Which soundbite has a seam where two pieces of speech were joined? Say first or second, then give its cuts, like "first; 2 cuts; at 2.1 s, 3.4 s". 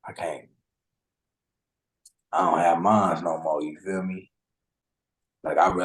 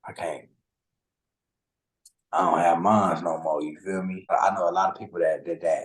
second; 1 cut; at 4.3 s